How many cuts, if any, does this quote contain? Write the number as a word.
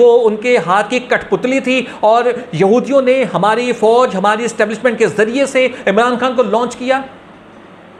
zero